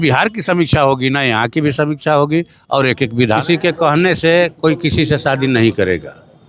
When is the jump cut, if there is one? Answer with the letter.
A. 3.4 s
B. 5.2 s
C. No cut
A